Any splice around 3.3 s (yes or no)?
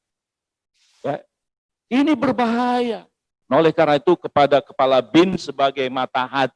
yes